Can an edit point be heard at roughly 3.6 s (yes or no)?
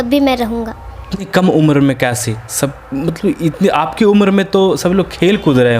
no